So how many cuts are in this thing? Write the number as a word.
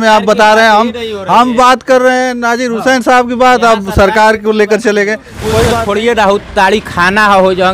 one